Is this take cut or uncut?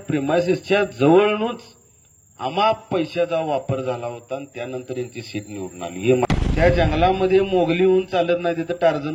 cut